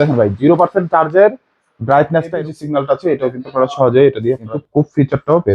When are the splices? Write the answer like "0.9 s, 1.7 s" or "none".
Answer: 2.3 s, 4.6 s